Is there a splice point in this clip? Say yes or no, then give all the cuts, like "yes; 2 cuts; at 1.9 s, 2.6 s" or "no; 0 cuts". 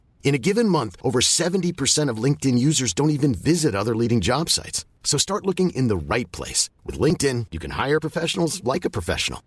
no; 0 cuts